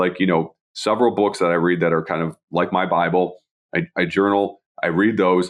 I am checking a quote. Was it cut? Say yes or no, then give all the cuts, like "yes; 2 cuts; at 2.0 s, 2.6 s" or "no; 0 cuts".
no; 0 cuts